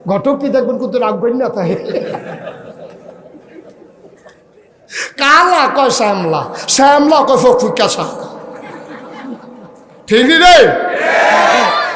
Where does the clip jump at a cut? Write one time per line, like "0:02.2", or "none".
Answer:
none

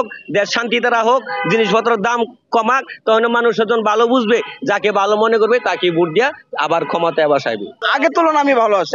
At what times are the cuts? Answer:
0:07.8

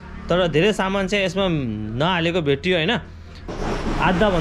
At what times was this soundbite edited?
0:03.5

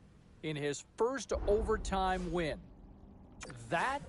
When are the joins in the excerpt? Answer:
none

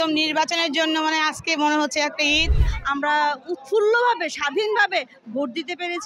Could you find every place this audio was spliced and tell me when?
0:02.7

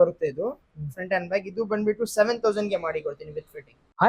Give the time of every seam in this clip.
none

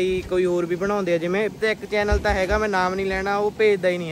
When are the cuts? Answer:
0:01.6

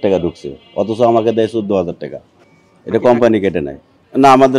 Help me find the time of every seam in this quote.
none

